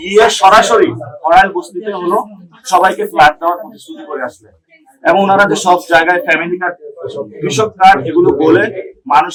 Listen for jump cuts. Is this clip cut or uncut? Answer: uncut